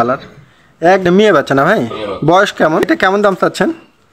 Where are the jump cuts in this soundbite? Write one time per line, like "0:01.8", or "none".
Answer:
0:01.0
0:02.8